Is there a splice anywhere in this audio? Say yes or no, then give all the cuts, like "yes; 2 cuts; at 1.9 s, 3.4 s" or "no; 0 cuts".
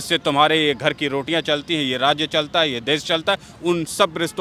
no; 0 cuts